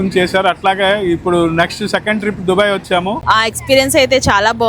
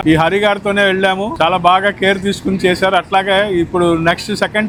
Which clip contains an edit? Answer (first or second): first